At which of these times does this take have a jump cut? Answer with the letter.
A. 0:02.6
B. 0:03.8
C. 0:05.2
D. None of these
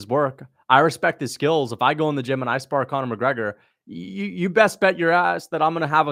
D